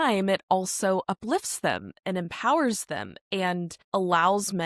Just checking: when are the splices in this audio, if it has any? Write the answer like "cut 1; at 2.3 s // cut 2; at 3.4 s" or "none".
cut 1; at 3.8 s

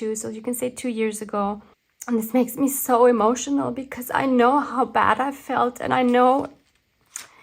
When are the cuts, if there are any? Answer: cut 1; at 1.7 s

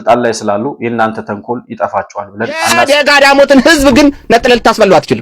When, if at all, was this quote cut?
cut 1; at 2.9 s

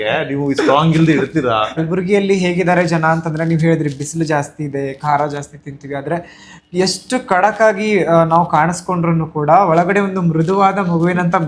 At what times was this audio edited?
cut 1; at 1.8 s

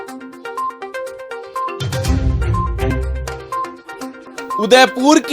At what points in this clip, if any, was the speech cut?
cut 1; at 2.6 s // cut 2; at 4.0 s

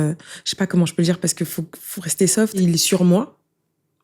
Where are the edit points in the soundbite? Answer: cut 1; at 2.6 s

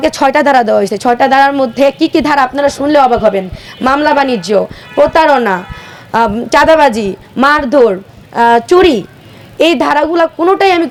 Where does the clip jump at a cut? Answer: none

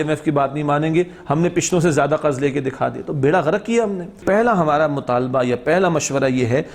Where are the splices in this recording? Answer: cut 1; at 4.2 s

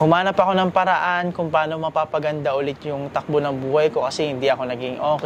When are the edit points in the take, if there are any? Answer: none

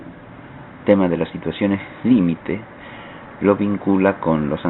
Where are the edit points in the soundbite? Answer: none

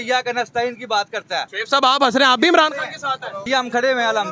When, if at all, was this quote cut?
cut 1; at 1.5 s // cut 2; at 3.3 s

